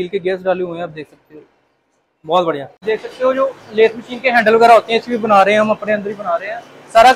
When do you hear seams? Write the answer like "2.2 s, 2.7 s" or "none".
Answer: 2.8 s